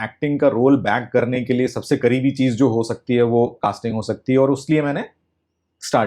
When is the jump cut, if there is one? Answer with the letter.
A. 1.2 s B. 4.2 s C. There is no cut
C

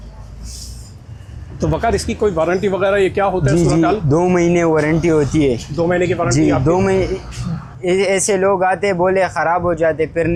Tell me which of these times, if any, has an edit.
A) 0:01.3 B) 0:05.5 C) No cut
C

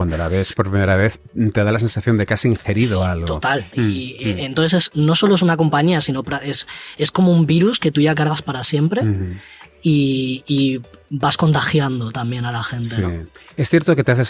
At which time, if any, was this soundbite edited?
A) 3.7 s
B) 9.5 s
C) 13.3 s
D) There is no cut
A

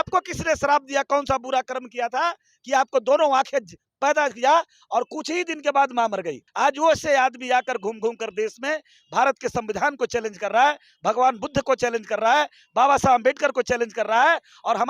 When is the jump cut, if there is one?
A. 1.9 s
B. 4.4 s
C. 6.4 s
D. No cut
C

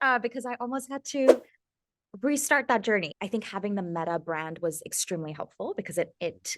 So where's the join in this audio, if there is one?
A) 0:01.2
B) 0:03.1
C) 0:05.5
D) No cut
B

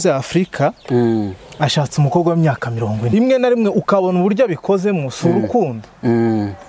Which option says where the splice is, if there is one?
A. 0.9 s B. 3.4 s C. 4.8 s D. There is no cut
B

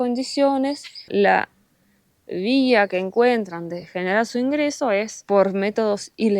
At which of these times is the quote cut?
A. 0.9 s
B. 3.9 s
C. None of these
A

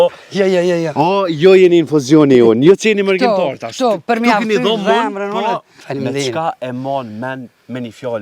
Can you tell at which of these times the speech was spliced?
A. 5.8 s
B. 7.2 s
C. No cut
A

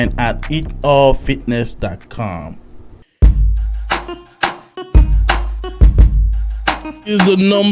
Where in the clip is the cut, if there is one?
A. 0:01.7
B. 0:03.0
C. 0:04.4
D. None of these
B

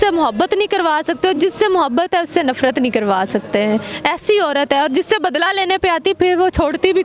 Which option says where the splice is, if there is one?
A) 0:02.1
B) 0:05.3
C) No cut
C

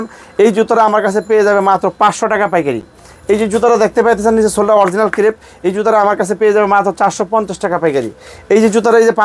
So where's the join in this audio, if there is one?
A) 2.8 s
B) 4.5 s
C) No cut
C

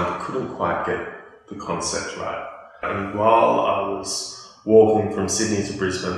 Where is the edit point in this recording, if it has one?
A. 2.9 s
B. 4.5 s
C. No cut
A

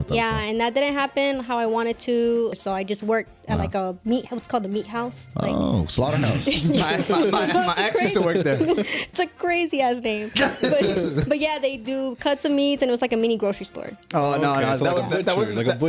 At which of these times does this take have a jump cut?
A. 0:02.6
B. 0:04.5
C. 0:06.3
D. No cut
A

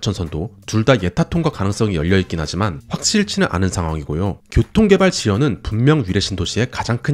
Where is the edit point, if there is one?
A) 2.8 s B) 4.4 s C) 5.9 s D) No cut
B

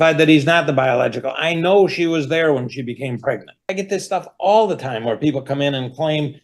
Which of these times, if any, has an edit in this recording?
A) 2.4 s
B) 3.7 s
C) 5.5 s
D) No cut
B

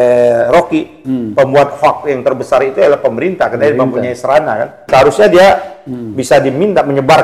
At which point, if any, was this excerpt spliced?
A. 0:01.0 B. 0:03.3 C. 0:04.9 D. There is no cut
C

